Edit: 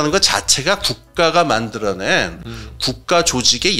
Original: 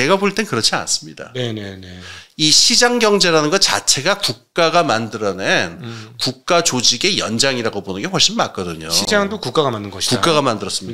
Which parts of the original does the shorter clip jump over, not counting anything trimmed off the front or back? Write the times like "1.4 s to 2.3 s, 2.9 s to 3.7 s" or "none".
none